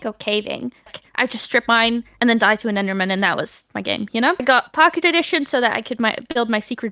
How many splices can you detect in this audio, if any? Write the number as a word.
zero